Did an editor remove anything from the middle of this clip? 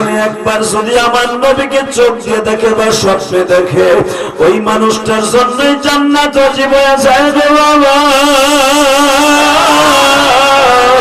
no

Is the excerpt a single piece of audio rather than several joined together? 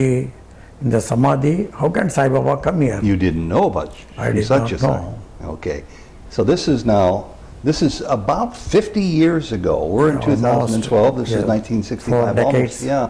yes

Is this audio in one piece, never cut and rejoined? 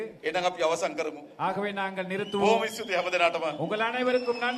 yes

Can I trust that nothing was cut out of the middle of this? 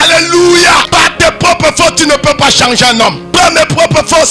no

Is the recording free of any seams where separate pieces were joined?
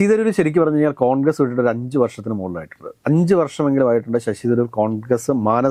yes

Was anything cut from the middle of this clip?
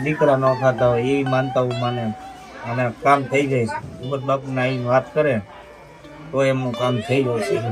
no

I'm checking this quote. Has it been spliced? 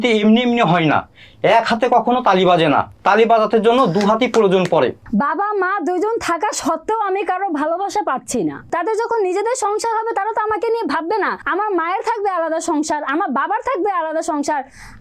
yes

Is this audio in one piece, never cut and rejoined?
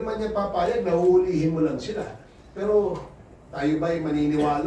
yes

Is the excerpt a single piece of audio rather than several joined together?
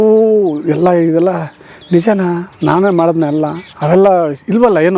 no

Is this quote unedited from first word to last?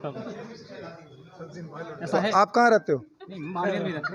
yes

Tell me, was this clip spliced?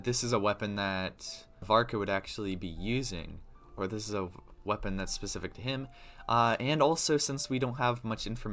yes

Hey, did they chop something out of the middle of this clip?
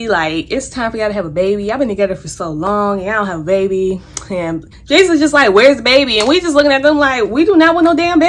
no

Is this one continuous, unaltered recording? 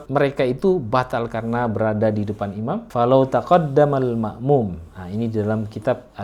no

